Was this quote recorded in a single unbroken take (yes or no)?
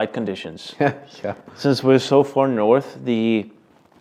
yes